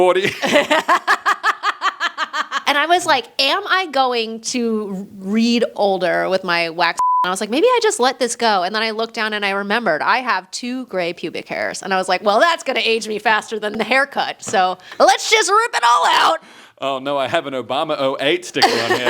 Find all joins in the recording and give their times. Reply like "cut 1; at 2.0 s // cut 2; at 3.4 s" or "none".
cut 1; at 2.6 s // cut 2; at 5.7 s // cut 3; at 7.2 s // cut 4; at 13.8 s // cut 5; at 14.8 s